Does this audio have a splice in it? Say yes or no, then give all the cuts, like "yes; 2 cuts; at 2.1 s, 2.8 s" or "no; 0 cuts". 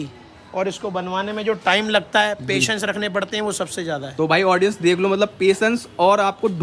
no; 0 cuts